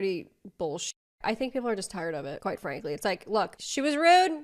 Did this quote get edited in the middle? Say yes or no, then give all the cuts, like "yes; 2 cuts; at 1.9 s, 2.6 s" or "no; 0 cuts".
no; 0 cuts